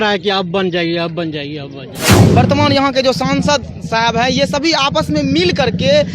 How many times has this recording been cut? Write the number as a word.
two